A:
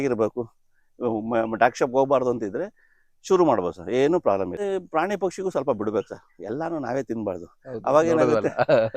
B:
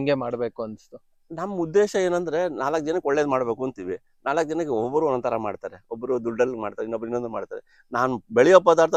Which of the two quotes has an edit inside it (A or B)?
A